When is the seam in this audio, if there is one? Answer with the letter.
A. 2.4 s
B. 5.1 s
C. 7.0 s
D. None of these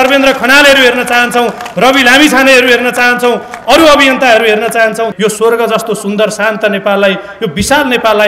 B